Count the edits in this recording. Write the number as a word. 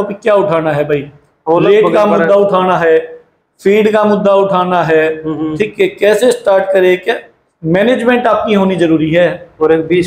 zero